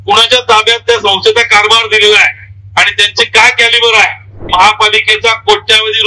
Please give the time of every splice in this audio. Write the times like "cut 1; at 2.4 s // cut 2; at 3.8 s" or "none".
cut 1; at 4.4 s